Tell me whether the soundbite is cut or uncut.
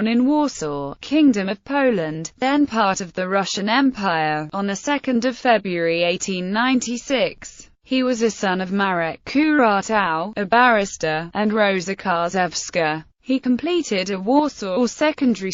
cut